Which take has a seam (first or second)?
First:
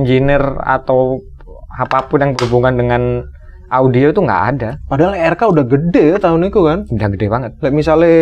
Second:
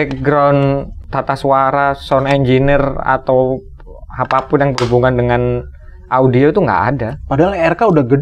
second